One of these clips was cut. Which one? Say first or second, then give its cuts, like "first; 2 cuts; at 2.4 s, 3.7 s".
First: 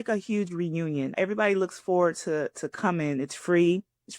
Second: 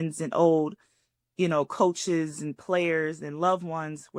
first; 1 cut; at 1.2 s